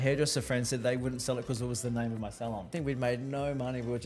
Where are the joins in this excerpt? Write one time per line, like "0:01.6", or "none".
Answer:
0:02.7